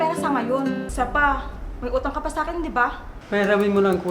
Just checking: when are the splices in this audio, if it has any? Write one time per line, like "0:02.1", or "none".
0:00.9
0:03.1